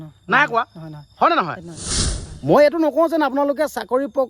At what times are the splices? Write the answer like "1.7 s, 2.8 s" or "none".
2.0 s

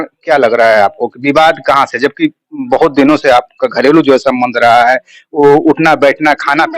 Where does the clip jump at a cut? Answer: none

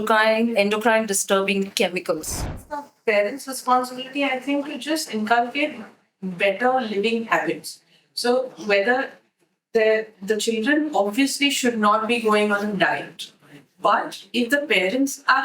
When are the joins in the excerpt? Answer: 2.3 s

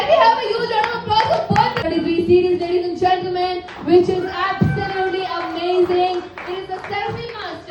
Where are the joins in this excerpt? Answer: 1.8 s

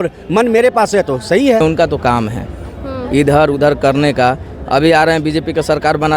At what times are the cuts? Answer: 1.6 s

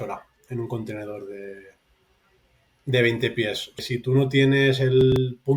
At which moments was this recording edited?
3.8 s

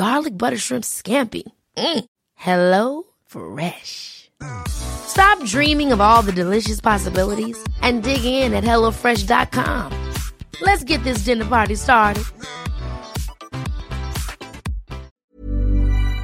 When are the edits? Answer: 15.2 s

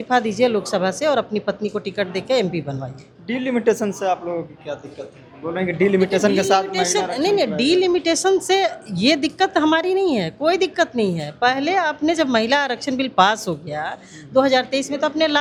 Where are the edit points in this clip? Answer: none

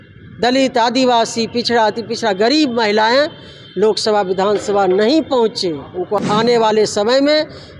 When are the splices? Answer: 6.2 s

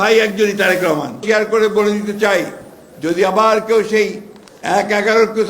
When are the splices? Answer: 1.2 s

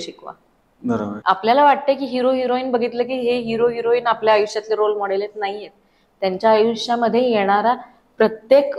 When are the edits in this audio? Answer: 1.2 s

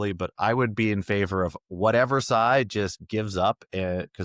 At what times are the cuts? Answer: none

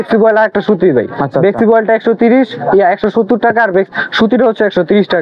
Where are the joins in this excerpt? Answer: none

